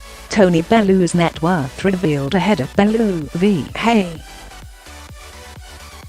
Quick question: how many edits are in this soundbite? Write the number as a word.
one